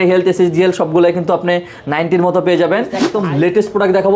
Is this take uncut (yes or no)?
no